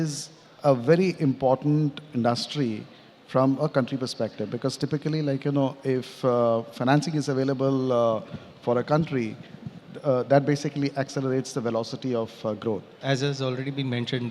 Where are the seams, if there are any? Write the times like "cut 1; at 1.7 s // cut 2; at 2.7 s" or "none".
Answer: cut 1; at 12.9 s